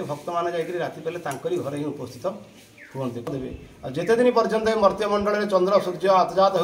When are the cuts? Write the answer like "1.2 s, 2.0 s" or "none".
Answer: 3.2 s